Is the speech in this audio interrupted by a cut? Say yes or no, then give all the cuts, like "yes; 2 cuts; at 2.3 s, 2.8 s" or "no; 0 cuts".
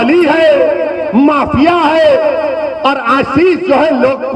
no; 0 cuts